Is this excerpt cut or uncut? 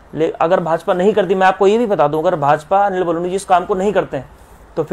uncut